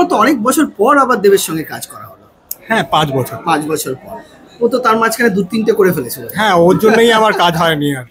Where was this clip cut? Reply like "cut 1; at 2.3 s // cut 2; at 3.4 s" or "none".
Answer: none

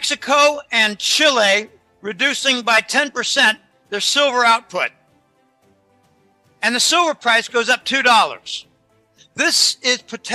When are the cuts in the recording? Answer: cut 1; at 9.2 s

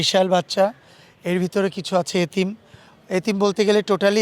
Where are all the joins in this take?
none

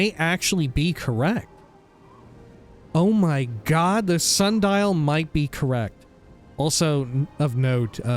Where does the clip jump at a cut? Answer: cut 1; at 1.4 s // cut 2; at 2.9 s

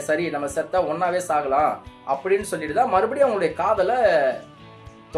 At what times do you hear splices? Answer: none

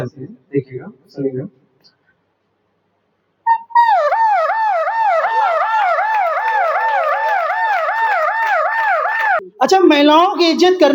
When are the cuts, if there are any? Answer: cut 1; at 9.4 s

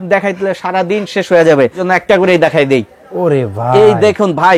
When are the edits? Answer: cut 1; at 1.8 s

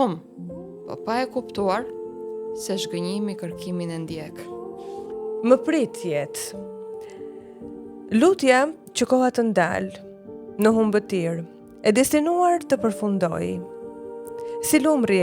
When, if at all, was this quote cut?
cut 1; at 5.4 s

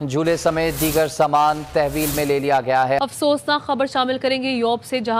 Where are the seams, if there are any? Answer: cut 1; at 3.0 s

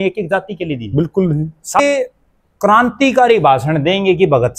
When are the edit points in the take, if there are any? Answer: cut 1; at 1.8 s

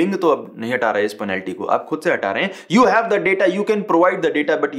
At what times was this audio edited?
none

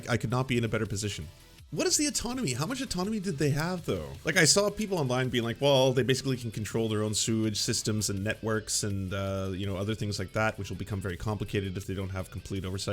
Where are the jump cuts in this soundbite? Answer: cut 1; at 1.7 s // cut 2; at 4.2 s

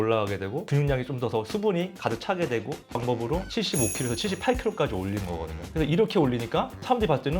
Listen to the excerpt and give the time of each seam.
cut 1; at 3.0 s

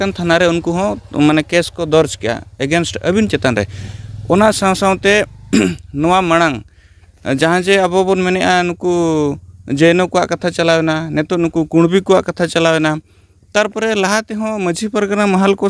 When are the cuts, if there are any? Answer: none

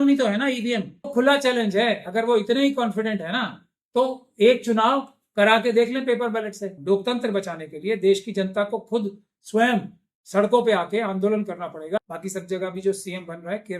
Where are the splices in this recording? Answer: cut 1; at 1.1 s // cut 2; at 6.7 s // cut 3; at 12.0 s

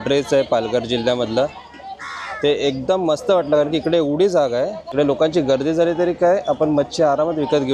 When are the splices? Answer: none

